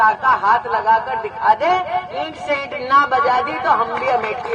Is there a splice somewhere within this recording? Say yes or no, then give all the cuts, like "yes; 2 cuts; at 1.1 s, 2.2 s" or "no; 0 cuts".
no; 0 cuts